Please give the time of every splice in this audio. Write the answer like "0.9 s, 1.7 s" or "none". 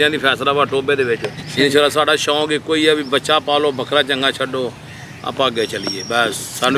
1.4 s